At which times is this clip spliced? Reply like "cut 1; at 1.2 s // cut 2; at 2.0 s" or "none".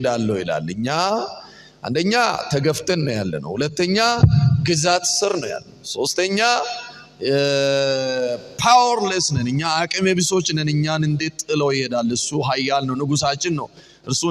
none